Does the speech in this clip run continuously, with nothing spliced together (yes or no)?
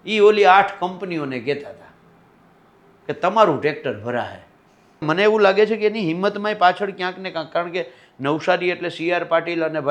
no